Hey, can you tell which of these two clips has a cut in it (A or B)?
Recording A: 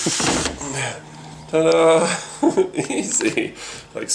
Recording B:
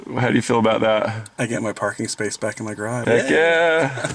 B